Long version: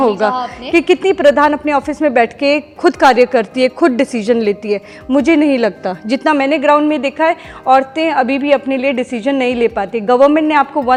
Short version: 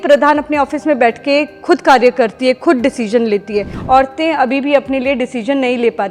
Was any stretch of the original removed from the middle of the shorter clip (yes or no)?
yes